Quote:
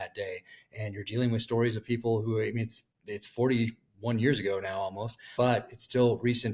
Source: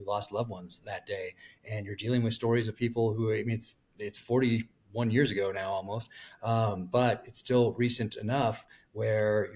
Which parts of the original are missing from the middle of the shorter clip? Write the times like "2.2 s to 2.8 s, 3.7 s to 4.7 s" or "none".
6.2 s to 6.8 s